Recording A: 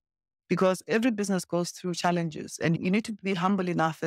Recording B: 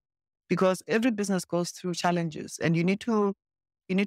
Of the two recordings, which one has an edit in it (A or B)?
A